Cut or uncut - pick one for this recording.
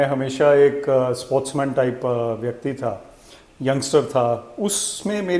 uncut